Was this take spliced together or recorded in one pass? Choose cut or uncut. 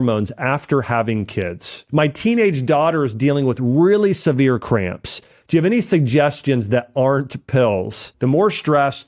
cut